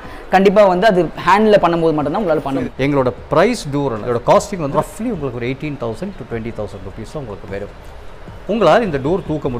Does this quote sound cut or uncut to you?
cut